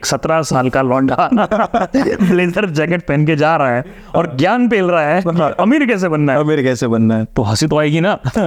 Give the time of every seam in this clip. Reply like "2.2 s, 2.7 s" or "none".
none